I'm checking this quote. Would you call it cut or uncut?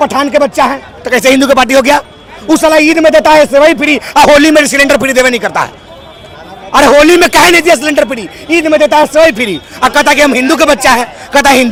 uncut